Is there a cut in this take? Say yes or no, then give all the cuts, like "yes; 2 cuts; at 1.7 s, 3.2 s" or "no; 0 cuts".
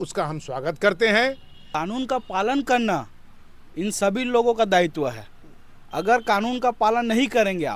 yes; 1 cut; at 1.6 s